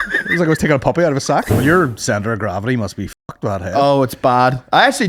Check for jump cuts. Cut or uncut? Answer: cut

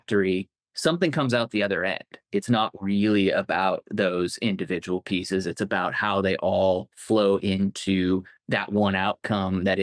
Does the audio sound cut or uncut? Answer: uncut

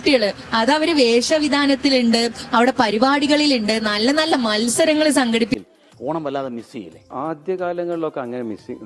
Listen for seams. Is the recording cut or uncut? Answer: cut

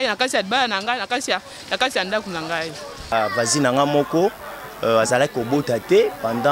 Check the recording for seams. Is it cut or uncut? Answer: cut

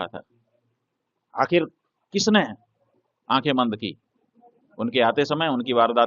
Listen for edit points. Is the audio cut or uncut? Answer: uncut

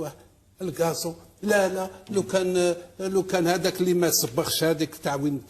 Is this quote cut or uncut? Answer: uncut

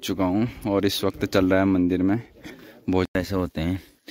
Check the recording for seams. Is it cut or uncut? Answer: cut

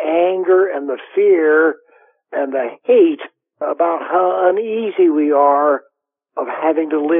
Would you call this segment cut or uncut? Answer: uncut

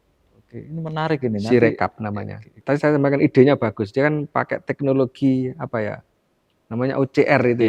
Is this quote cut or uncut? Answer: cut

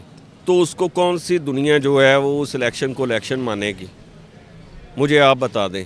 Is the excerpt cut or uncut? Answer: uncut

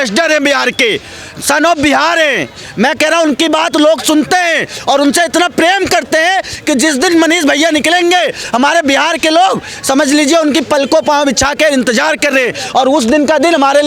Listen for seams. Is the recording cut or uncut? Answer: uncut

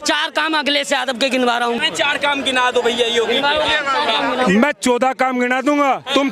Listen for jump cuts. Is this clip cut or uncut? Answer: uncut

